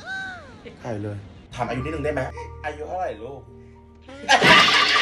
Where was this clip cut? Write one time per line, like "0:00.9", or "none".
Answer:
0:01.4